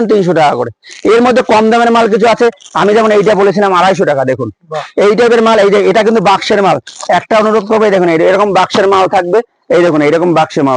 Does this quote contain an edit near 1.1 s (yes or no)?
no